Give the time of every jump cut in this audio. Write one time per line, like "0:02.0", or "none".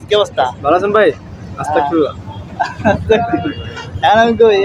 0:02.7